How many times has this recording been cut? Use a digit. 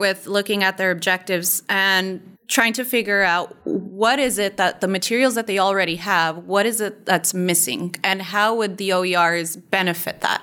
2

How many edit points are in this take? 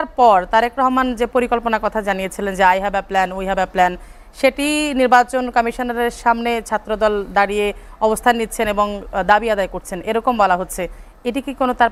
0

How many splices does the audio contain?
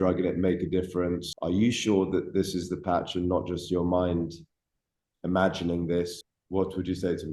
2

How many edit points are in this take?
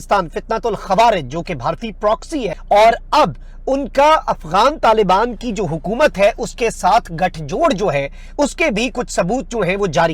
1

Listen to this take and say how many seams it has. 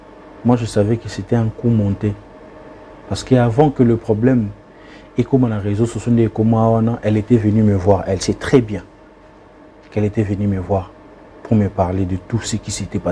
0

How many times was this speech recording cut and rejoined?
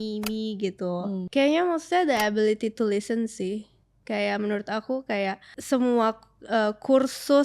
2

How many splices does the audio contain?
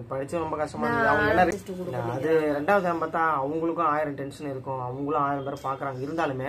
1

